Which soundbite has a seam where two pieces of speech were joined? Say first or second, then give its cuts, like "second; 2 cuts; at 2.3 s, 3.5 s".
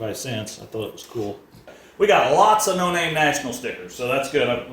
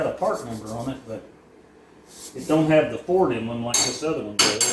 first; 1 cut; at 1.8 s